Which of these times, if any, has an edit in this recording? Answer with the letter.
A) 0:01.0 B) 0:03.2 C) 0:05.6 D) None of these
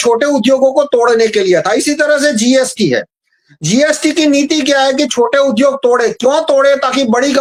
D